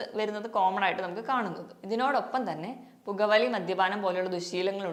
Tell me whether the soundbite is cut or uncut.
uncut